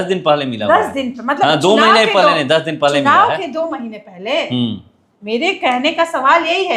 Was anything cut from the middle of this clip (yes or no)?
no